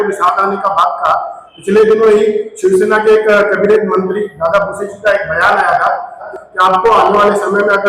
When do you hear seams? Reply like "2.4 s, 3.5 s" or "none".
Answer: 6.3 s